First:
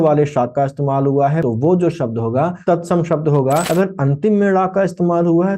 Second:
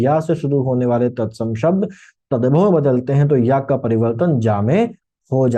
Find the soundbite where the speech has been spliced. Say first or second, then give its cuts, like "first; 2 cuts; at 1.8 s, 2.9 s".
first; 3 cuts; at 1.4 s, 2.6 s, 3.7 s